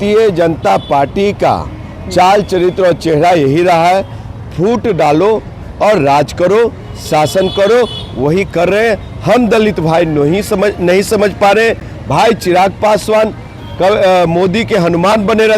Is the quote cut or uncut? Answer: uncut